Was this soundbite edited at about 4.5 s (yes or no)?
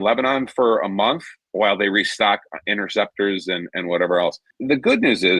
yes